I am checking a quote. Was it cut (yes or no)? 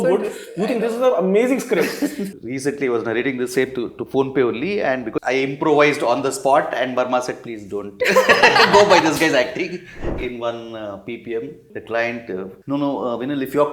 yes